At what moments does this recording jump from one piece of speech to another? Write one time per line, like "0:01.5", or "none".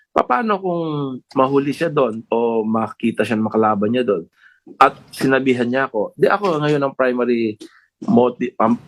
none